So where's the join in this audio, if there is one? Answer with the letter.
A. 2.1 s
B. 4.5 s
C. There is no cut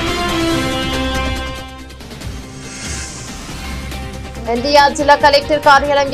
B